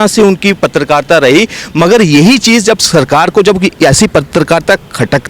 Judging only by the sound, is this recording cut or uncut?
uncut